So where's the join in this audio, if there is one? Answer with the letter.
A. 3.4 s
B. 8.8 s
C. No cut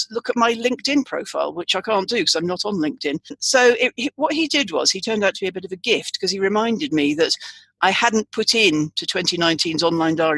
A